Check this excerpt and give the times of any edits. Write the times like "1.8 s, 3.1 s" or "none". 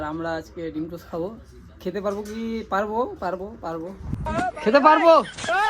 none

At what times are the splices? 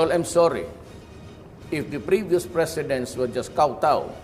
none

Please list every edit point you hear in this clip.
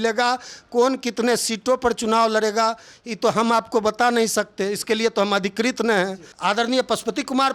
6.2 s

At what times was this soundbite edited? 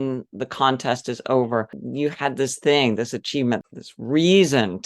1.8 s, 3.6 s

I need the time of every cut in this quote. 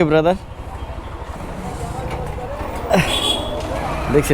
1.3 s

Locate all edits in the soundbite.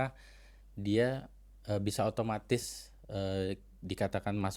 none

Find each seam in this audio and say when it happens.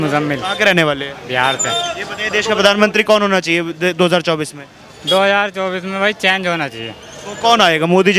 none

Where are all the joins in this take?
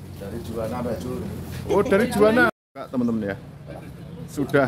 2.5 s

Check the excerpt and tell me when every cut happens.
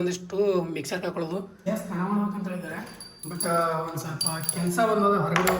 1.6 s

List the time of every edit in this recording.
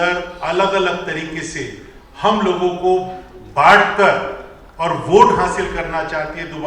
none

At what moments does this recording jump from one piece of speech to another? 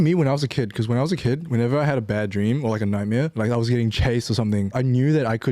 3.3 s, 4.7 s

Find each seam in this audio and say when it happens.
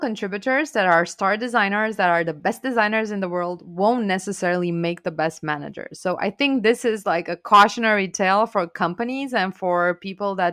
none

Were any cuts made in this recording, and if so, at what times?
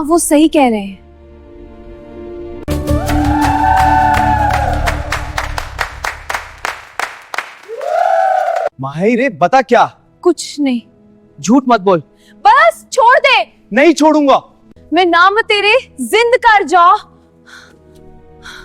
2.7 s, 8.8 s

